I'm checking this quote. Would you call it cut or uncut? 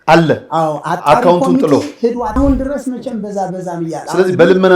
cut